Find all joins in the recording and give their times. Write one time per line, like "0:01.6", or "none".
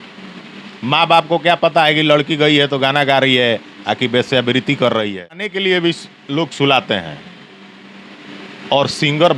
0:05.5